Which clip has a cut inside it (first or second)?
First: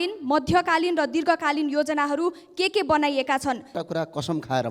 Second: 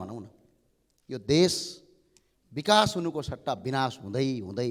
first